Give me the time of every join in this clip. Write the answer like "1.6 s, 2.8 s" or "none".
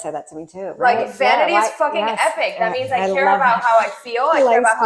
none